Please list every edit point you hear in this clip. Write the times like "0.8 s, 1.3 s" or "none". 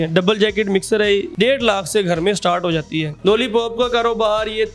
1.3 s, 3.0 s